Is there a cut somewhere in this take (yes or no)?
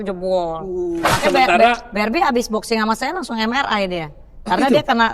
yes